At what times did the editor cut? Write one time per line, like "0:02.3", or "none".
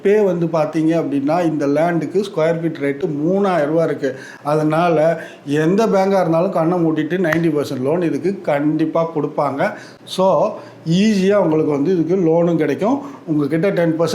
none

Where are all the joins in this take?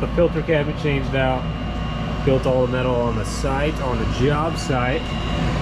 none

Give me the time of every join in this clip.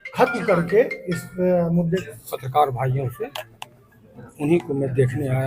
0:02.0

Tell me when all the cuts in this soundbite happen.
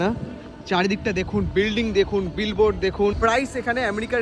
0:03.2

